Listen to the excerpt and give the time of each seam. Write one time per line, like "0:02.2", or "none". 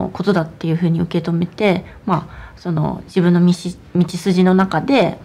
none